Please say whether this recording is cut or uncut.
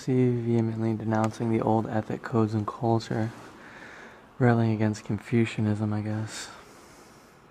cut